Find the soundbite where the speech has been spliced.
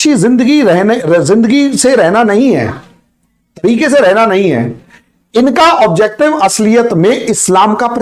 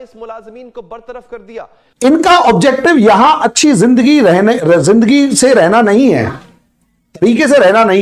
second; 1 cut; at 1.8 s

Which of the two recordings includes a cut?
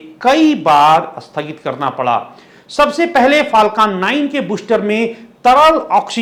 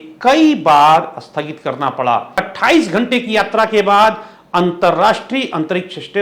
second; 1 cut; at 2.5 s

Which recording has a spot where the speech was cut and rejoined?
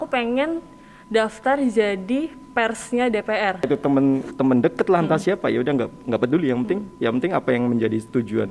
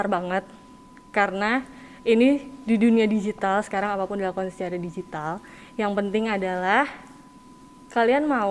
first; 1 cut; at 3.7 s

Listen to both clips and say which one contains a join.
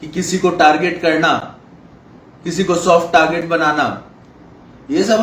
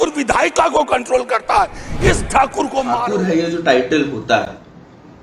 second; 1 cut; at 3.0 s

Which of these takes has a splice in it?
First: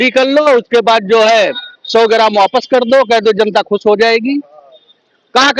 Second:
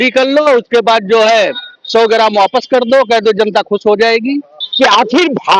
second; 1 cut; at 4.6 s

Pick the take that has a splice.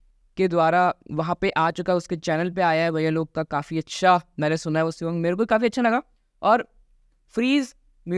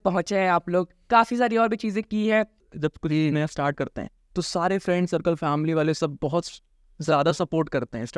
second; 1 cut; at 2.5 s

